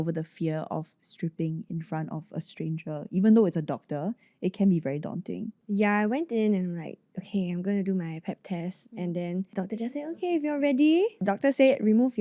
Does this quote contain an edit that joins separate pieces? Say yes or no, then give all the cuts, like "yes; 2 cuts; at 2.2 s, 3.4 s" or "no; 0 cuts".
no; 0 cuts